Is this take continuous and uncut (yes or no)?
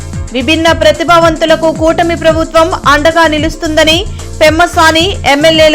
yes